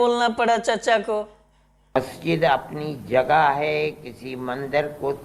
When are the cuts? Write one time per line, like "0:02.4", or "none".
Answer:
0:01.9